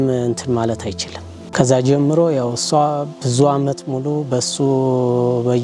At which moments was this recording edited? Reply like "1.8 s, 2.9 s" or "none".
1.5 s